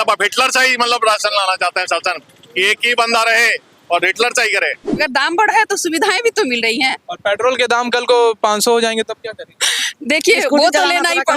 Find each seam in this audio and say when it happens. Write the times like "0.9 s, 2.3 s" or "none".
4.9 s